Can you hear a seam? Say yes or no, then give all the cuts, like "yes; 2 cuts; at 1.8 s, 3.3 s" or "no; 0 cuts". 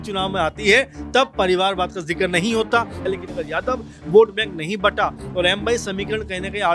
yes; 1 cut; at 3.0 s